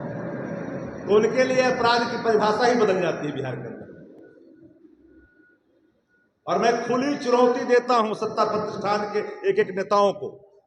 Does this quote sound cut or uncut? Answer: uncut